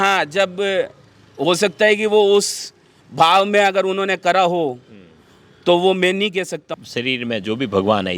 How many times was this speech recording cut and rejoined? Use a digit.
1